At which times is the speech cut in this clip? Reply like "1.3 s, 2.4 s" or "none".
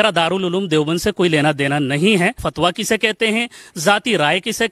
2.5 s